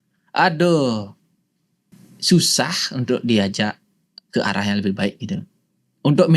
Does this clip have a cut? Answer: no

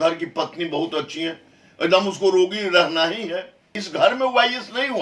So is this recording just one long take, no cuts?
no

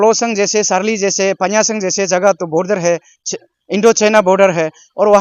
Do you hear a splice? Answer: no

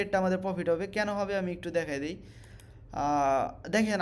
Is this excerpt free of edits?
yes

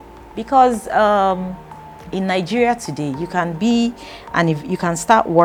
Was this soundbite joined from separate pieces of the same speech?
no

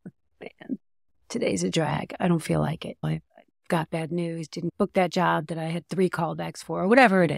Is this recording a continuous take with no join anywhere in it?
no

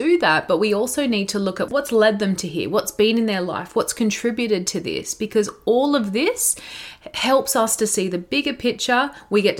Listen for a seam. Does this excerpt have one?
no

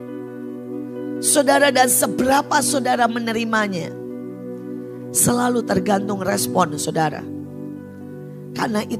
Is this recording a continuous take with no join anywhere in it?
yes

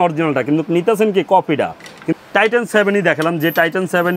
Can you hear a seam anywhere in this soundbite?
yes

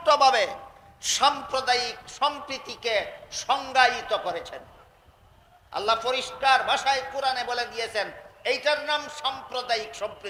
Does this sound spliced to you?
no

